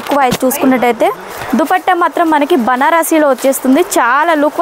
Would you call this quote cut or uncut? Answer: cut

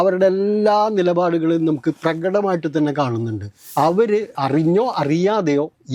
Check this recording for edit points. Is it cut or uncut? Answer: cut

